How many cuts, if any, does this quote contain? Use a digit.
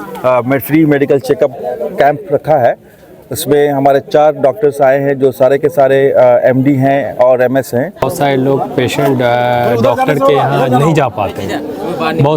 1